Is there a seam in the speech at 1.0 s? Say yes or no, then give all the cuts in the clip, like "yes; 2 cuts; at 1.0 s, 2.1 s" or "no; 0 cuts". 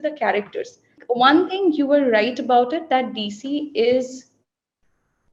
yes; 1 cut; at 1.0 s